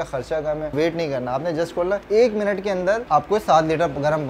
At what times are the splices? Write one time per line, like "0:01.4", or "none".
0:00.7
0:02.0
0:03.0